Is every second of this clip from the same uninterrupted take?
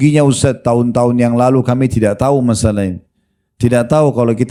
yes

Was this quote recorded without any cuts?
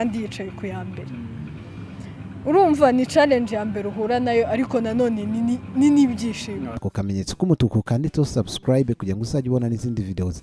no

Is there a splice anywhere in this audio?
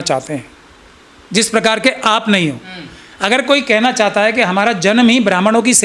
no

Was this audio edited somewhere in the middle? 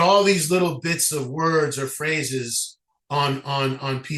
no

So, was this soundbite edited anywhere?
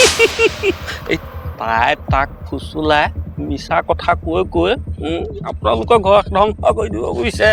no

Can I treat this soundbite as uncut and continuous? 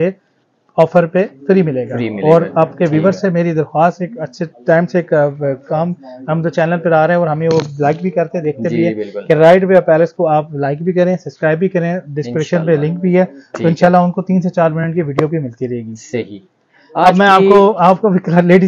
yes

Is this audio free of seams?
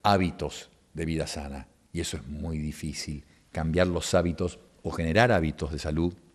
yes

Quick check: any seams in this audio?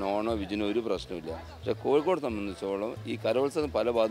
no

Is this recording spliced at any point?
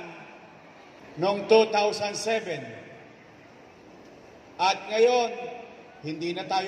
yes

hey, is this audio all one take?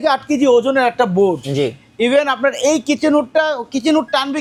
yes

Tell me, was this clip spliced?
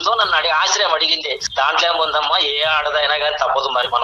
yes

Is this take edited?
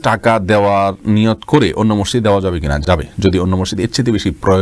no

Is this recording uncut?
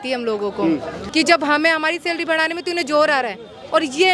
no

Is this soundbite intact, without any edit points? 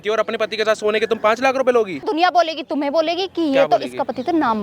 no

